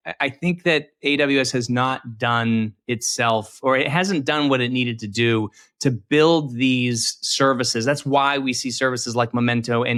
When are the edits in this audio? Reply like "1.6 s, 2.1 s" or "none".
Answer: none